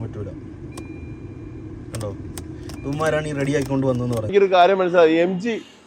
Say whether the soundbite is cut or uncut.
cut